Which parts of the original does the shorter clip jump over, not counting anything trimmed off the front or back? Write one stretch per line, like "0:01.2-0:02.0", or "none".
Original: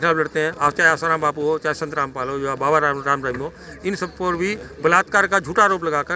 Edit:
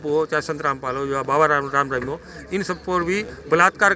none